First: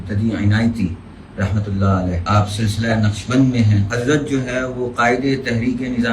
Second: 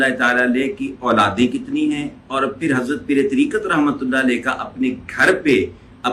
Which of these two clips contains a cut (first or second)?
first